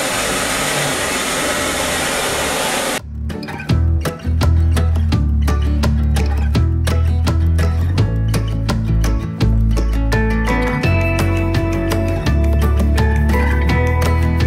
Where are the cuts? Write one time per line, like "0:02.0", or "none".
none